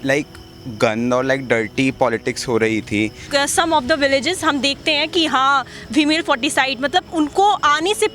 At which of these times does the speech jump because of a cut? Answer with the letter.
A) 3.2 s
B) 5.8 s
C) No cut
A